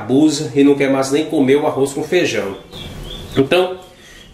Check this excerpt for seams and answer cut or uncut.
uncut